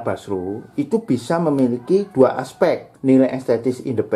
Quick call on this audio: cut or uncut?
cut